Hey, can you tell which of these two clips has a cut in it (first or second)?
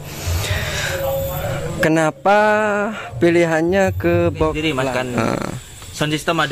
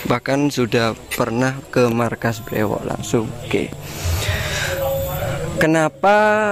first